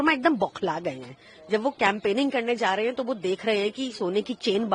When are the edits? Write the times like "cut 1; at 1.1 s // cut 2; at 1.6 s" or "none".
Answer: none